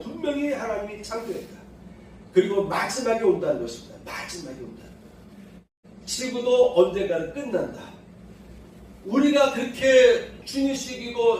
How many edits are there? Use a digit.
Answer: 1